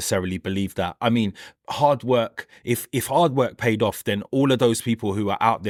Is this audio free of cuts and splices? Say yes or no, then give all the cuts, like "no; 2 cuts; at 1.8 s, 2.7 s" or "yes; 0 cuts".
yes; 0 cuts